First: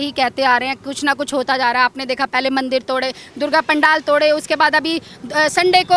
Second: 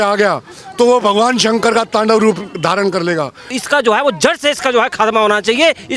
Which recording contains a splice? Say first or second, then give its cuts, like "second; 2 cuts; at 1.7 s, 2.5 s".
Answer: second; 1 cut; at 3.6 s